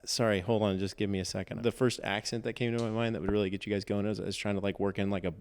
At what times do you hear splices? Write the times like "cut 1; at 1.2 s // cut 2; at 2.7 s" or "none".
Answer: cut 1; at 1.5 s